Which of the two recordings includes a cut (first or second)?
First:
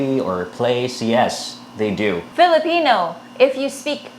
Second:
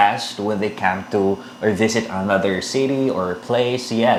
first